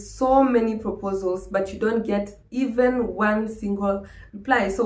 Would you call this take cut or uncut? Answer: uncut